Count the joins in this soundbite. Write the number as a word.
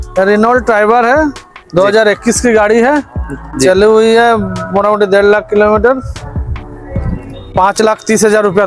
zero